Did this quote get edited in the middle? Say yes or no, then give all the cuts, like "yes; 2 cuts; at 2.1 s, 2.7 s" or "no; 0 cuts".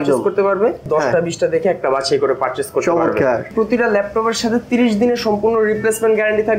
yes; 2 cuts; at 0.9 s, 3.5 s